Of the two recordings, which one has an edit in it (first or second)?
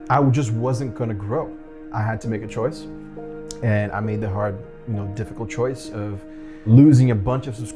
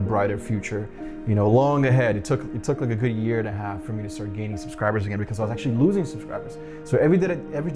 first